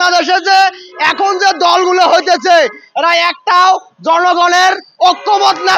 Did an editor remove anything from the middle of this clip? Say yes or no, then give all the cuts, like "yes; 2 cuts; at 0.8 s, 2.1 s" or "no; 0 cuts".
no; 0 cuts